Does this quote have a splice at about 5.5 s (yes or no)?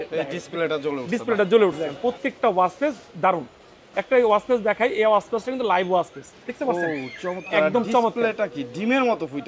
no